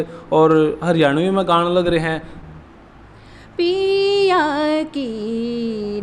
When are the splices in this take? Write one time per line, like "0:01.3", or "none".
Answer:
0:02.3